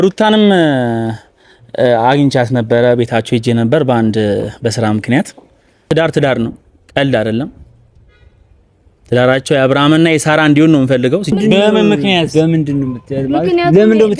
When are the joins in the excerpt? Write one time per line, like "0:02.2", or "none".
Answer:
0:05.8
0:11.3